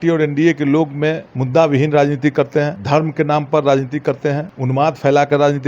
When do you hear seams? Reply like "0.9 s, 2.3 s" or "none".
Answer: 1.3 s, 2.8 s, 4.5 s